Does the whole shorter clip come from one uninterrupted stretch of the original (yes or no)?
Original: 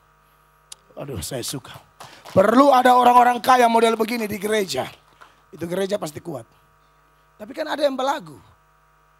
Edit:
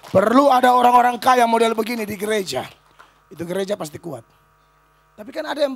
yes